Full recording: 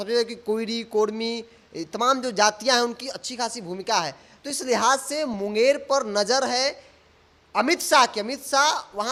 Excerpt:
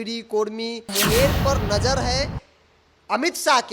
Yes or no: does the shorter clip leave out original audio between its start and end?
yes